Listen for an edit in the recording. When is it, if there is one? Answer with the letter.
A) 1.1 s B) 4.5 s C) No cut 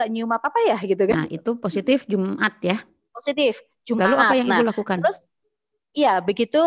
A